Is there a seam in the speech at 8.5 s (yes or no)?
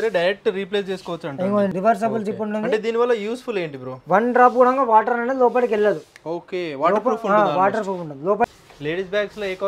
yes